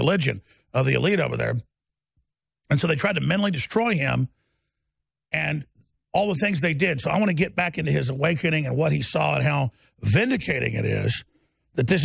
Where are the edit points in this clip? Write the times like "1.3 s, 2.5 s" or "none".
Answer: none